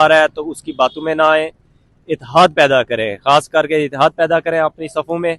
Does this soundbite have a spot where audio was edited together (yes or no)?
no